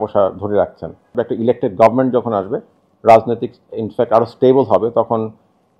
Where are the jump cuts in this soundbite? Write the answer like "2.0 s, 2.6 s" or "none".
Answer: 1.1 s